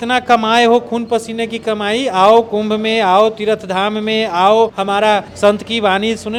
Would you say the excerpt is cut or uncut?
uncut